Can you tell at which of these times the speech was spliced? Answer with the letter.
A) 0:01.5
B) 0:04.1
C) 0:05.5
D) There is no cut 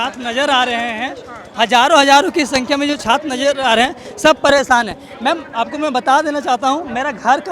D